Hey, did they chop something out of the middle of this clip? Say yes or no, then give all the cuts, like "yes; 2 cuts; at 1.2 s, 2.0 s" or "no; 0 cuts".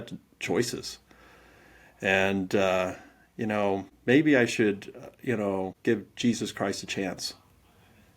yes; 2 cuts; at 3.9 s, 5.7 s